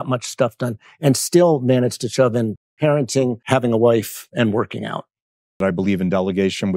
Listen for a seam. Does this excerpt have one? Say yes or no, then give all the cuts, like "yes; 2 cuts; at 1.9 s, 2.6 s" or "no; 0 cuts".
yes; 3 cuts; at 3.4 s, 4.2 s, 5.5 s